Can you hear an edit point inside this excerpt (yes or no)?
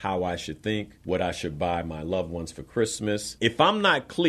yes